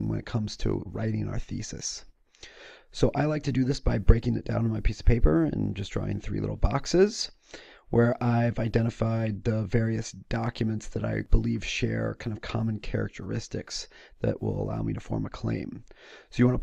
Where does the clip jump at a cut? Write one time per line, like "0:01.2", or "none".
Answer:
none